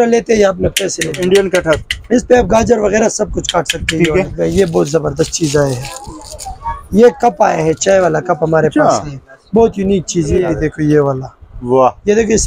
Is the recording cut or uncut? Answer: cut